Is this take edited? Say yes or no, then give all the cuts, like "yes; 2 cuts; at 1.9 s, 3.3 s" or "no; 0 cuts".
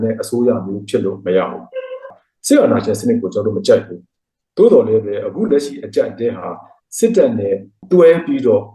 yes; 2 cuts; at 2.1 s, 7.7 s